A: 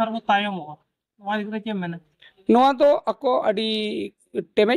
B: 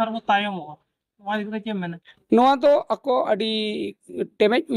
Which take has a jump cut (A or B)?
B